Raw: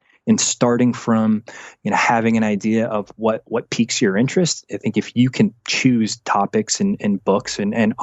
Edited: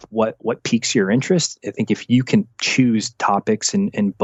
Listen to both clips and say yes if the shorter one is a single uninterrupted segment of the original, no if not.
yes